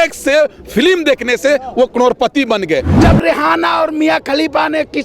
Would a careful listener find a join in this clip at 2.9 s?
yes; 1 cut; at 2.9 s

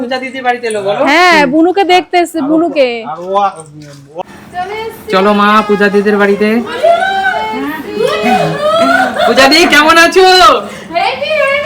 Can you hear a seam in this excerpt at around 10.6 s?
no; 1 cut; at 4.2 s

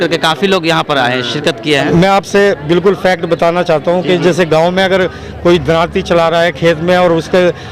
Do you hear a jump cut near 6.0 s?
no; 1 cut; at 1.9 s

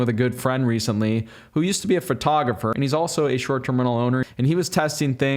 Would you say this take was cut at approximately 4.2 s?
yes; 2 cuts; at 2.7 s, 4.2 s

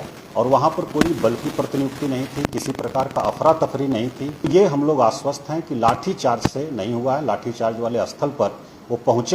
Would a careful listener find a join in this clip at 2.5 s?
no; 1 cut; at 4.5 s

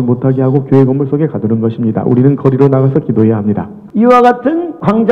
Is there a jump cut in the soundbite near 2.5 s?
no; 1 cut; at 3.7 s

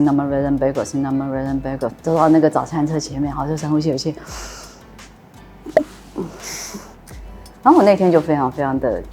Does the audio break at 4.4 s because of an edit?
no; 2 cuts; at 1.9 s, 7.5 s

